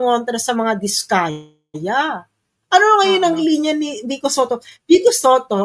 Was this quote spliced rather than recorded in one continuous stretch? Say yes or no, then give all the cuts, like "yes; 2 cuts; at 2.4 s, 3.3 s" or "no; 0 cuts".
no; 0 cuts